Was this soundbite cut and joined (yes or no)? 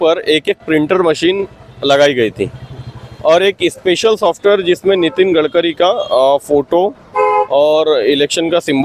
no